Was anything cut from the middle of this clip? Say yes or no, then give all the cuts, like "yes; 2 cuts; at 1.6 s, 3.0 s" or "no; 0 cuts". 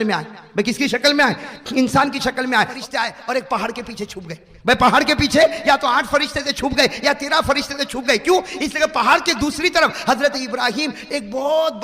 yes; 1 cut; at 2.7 s